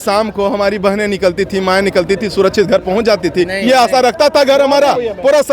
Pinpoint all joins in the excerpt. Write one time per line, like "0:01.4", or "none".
none